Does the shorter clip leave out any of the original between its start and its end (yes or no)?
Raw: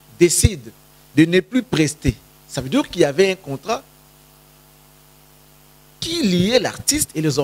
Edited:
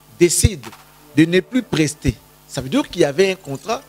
no